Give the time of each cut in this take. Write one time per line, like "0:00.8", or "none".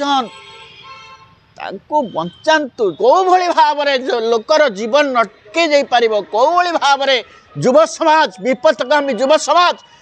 0:03.0